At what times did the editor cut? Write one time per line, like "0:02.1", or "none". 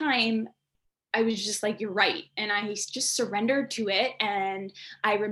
none